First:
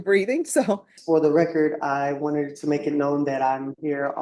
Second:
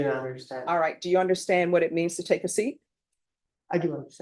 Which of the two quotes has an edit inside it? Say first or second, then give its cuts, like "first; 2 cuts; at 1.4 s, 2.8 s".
first; 1 cut; at 0.9 s